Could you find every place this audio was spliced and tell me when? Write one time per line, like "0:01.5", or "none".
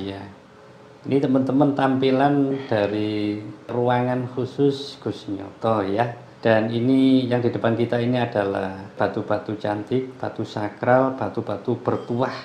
0:03.7
0:06.2
0:09.0